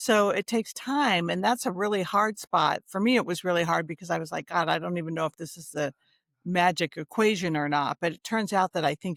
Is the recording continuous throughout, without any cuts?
yes; 0 cuts

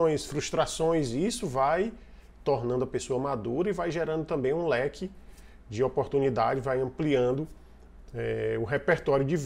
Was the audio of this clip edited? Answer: no; 0 cuts

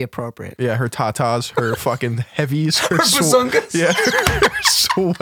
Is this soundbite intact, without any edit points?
yes; 0 cuts

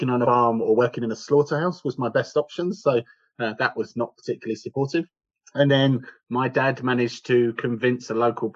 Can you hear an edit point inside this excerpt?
no; 0 cuts

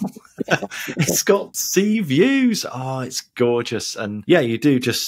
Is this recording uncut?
no; 2 cuts; at 1.6 s, 4.1 s

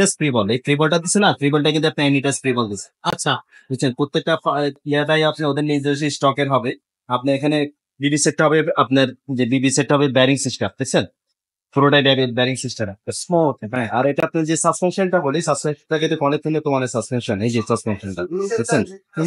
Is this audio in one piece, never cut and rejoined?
yes; 0 cuts

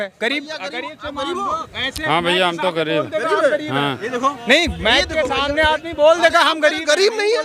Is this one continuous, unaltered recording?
yes; 0 cuts

